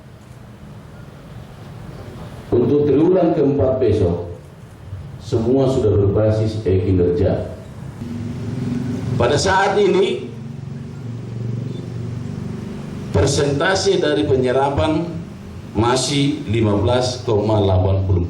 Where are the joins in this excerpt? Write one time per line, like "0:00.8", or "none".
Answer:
0:08.0